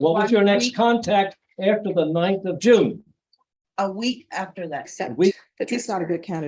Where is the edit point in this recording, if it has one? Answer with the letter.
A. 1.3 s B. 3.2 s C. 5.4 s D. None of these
C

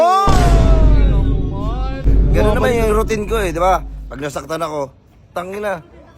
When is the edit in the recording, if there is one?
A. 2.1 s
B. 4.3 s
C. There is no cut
A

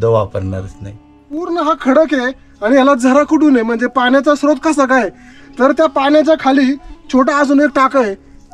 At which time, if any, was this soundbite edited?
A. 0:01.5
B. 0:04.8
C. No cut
A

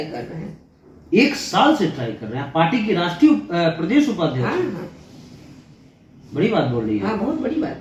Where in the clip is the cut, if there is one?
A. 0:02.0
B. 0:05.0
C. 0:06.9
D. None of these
D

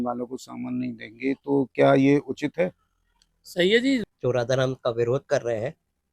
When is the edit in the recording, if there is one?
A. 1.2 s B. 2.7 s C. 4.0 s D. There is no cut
C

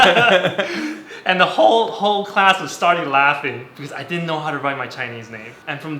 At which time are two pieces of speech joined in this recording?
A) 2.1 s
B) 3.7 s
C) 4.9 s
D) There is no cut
B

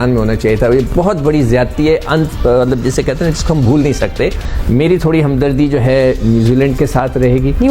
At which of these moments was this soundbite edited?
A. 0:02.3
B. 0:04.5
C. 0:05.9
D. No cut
B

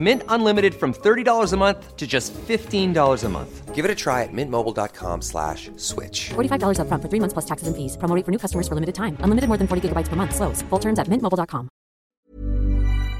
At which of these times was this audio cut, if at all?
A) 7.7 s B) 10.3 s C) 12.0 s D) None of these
C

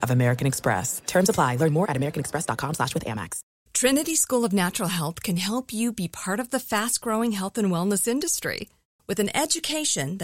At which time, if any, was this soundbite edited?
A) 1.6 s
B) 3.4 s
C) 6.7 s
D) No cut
B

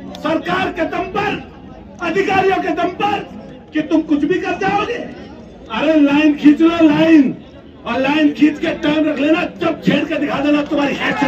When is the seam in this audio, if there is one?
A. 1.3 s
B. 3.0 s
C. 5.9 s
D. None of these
D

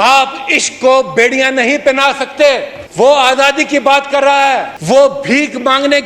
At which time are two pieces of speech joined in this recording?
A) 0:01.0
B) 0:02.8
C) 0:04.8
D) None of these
B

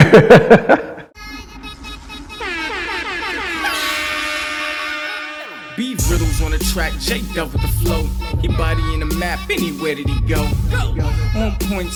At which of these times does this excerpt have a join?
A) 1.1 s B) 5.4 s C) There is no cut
A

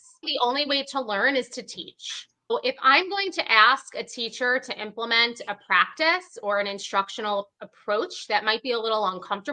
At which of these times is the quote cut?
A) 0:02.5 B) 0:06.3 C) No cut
A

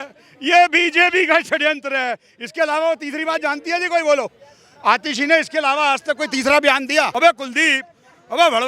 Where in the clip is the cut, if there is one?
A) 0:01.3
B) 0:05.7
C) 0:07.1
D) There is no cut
C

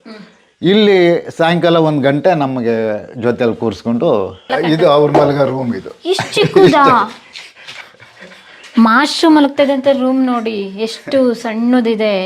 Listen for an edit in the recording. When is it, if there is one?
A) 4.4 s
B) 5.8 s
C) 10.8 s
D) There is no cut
A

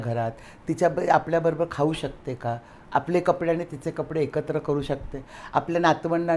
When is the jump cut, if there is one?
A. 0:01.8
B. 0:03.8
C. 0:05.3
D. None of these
D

